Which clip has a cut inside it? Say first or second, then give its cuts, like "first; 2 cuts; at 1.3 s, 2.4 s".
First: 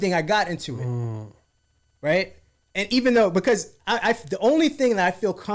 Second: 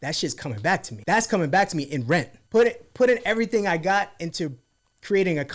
second; 2 cuts; at 0.9 s, 2.4 s